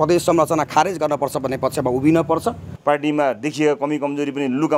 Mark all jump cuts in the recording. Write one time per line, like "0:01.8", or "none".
0:02.7